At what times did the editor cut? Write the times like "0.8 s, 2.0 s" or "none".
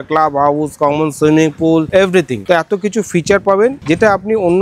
2.4 s